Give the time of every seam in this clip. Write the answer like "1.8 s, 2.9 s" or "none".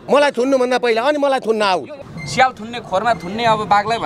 2.1 s